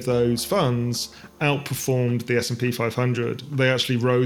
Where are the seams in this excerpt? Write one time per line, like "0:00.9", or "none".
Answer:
none